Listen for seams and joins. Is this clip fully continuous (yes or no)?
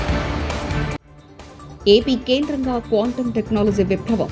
no